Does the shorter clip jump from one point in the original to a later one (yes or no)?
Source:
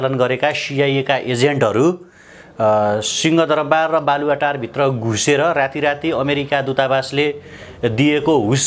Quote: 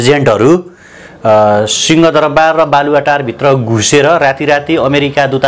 no